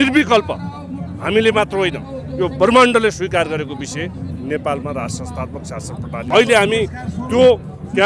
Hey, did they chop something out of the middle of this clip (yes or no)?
yes